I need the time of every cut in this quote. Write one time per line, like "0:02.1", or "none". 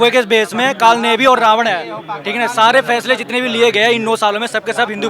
none